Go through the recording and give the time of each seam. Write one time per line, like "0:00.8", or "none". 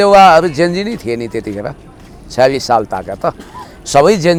none